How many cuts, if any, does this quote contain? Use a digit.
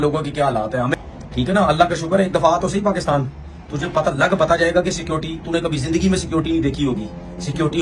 1